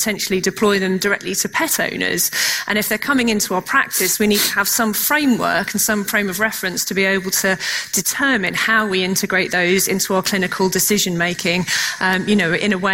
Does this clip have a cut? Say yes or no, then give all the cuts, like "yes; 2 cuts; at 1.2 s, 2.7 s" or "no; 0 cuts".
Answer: no; 0 cuts